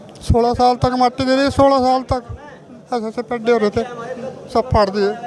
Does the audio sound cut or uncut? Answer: uncut